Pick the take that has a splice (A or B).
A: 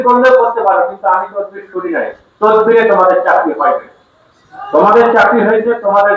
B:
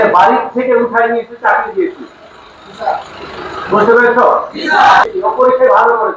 B